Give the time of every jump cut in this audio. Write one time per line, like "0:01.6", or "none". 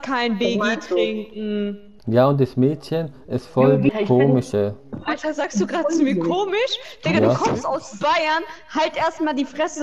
0:01.9
0:03.9
0:05.0

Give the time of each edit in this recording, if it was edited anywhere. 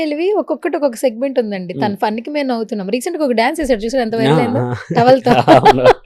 none

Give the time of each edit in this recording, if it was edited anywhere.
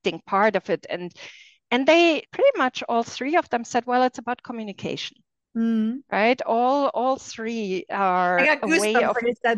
0:02.3

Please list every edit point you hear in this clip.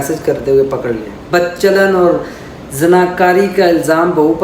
0:01.1

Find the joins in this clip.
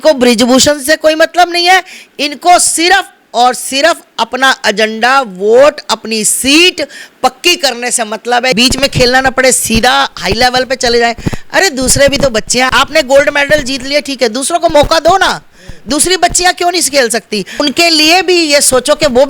0:08.5
0:12.7
0:17.6

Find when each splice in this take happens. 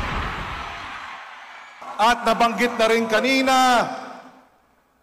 0:01.8

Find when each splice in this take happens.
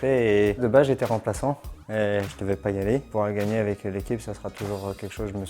0:03.1

